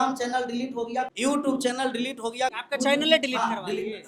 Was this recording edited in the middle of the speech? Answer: yes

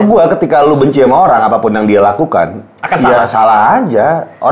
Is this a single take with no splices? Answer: yes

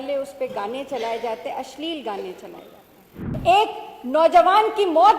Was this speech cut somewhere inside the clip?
yes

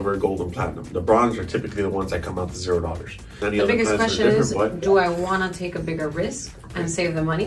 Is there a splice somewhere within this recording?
yes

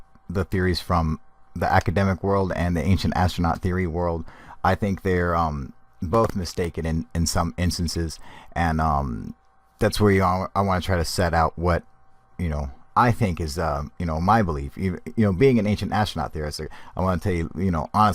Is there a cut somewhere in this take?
yes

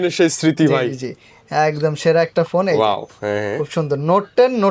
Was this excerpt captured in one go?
yes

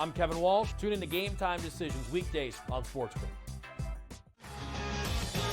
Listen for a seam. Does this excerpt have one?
yes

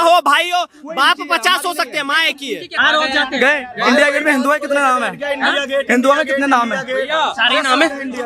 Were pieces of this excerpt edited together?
yes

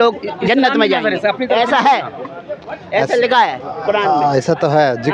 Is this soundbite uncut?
yes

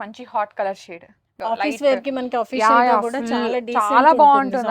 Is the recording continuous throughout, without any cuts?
no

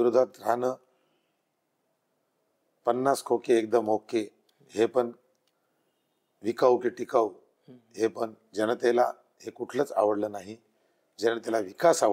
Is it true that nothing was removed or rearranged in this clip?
yes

